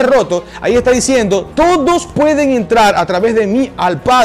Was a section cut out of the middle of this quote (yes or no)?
no